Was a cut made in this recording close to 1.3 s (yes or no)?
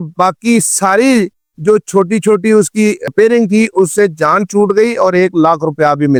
no